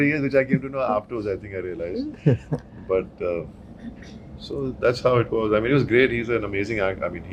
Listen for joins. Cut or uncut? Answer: uncut